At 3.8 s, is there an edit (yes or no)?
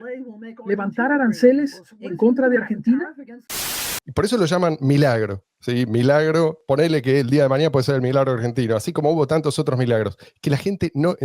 yes